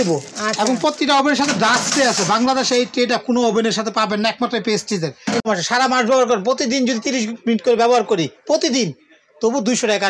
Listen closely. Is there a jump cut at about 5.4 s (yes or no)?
yes